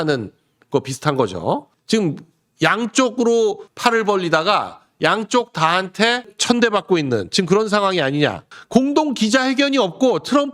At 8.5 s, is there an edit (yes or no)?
yes